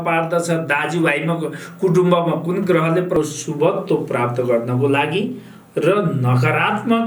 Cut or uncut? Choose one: cut